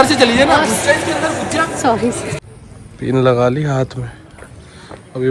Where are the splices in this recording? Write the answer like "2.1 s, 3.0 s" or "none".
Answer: 2.3 s